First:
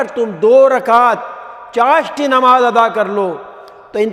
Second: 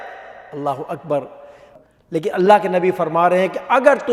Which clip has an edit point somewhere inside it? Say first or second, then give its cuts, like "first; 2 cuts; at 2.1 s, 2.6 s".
second; 1 cut; at 1.8 s